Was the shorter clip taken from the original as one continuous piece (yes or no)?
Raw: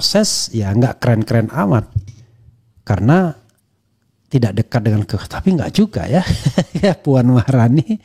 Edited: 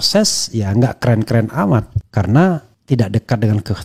no